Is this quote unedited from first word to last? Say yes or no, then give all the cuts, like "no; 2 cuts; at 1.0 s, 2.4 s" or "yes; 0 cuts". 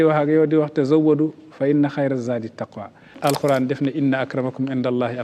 no; 1 cut; at 3.1 s